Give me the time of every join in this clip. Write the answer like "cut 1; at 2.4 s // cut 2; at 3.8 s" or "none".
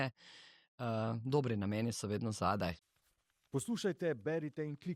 cut 1; at 2.8 s